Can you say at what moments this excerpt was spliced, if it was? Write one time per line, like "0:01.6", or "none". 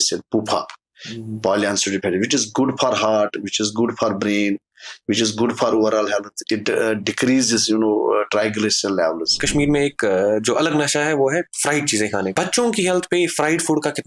0:09.4
0:12.3